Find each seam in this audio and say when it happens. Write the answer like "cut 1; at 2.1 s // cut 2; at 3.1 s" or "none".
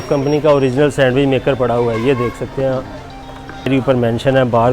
cut 1; at 3.7 s

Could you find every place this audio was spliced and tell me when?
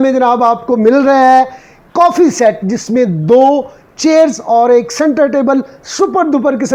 none

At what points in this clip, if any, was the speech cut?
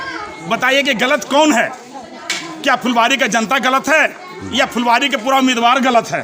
none

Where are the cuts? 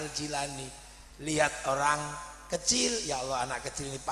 none

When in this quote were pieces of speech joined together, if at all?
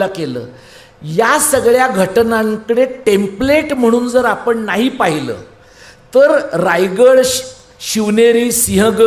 none

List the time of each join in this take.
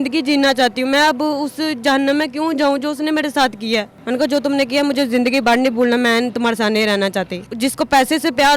cut 1; at 3.9 s // cut 2; at 7.5 s

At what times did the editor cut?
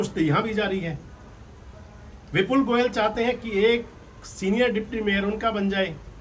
none

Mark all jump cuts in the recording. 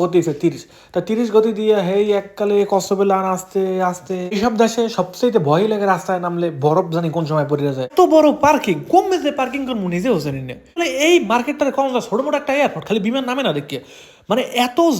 cut 1; at 4.4 s // cut 2; at 7.9 s // cut 3; at 10.8 s

